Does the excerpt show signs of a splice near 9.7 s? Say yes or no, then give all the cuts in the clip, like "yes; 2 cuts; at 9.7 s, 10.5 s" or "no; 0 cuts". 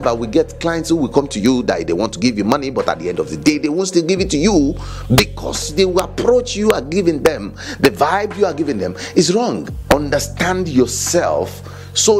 yes; 1 cut; at 9.7 s